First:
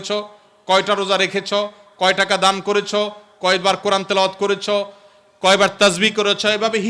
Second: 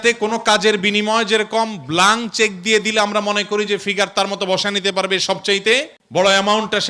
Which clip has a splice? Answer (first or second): second